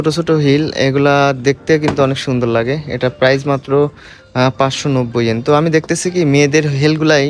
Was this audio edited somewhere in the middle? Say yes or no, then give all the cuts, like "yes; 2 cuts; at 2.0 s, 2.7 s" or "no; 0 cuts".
no; 0 cuts